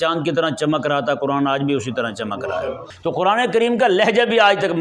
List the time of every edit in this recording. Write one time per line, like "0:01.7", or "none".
0:02.9